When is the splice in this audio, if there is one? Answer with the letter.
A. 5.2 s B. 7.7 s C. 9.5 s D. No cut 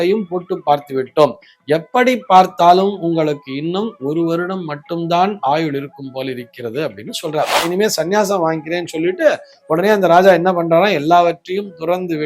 B